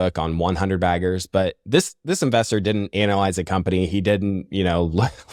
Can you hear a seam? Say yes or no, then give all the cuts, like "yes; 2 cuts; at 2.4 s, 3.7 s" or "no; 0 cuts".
no; 0 cuts